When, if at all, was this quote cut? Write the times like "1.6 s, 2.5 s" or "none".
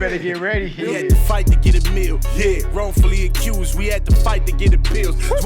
1.1 s